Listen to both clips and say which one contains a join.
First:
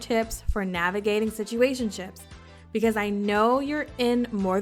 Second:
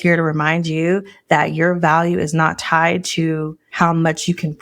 second; 1 cut; at 3.6 s

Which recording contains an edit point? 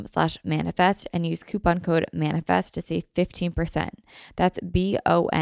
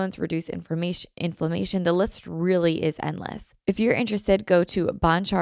second; 1 cut; at 3.5 s

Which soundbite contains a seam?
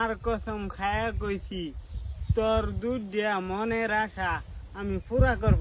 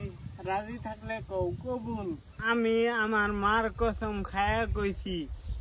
second; 1 cut; at 2.3 s

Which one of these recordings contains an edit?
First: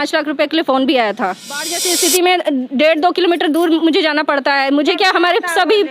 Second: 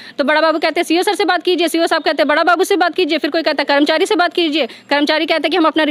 first; 1 cut; at 1.8 s

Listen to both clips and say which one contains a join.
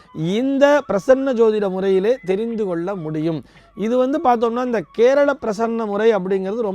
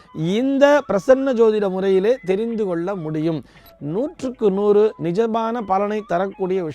second; 1 cut; at 3.6 s

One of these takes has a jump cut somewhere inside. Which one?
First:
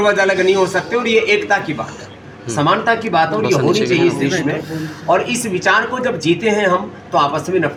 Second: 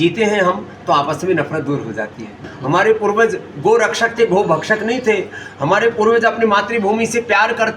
second; 1 cut; at 2.4 s

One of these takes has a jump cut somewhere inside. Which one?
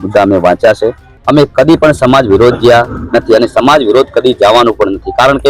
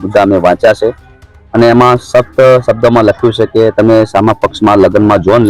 first; 1 cut; at 1.1 s

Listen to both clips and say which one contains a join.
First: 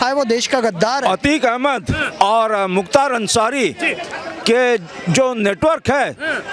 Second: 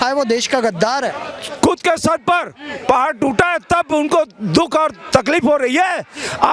second; 1 cut; at 1.0 s

